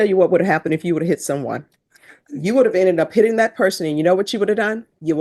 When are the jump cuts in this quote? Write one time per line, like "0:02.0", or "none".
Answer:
none